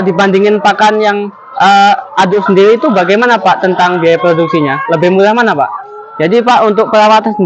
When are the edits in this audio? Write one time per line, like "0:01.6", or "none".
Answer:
0:05.6